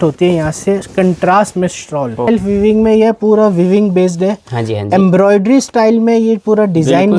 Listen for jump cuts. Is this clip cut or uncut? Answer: cut